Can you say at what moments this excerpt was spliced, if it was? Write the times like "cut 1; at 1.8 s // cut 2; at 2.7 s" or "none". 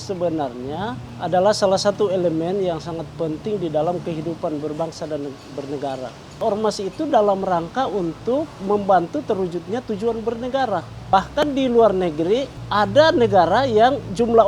cut 1; at 1.1 s // cut 2; at 6.4 s // cut 3; at 11.1 s // cut 4; at 12.6 s

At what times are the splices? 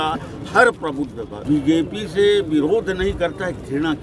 cut 1; at 1.3 s

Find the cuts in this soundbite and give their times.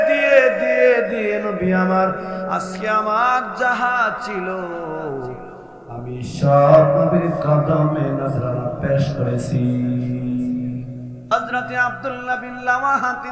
cut 1; at 11.3 s

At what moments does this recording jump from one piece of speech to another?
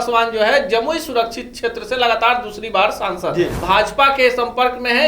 cut 1; at 3.6 s

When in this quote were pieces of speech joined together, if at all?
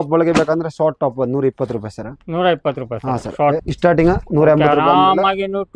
cut 1; at 3.6 s

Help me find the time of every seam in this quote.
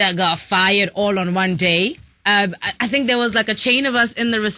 cut 1; at 2.1 s

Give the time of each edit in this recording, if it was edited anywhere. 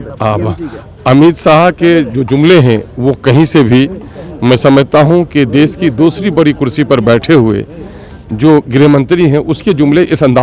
none

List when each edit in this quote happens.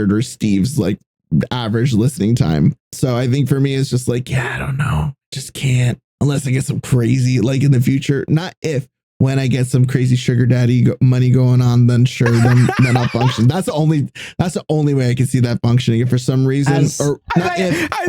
cut 1; at 2.9 s // cut 2; at 6.1 s

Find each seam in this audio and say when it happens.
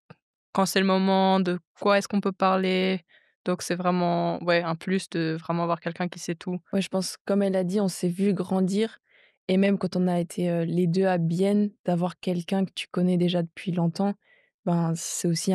cut 1; at 6.6 s

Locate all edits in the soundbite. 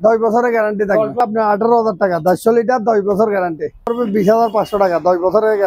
cut 1; at 1.2 s // cut 2; at 3.9 s

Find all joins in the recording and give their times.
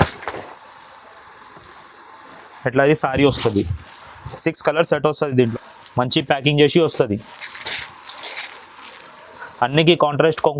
cut 1; at 5.5 s

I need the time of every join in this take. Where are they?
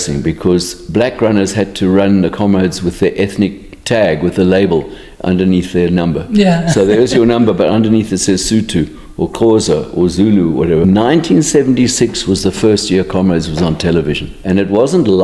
cut 1; at 10.8 s // cut 2; at 14.3 s

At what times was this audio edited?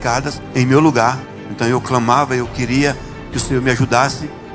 cut 1; at 1.3 s

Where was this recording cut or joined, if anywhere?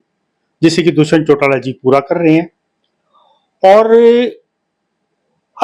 none

